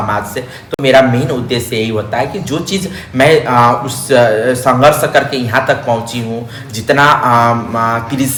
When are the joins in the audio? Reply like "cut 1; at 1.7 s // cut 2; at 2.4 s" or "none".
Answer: none